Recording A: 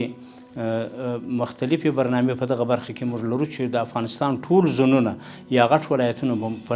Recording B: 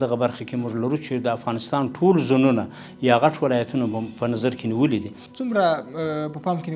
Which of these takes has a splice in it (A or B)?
B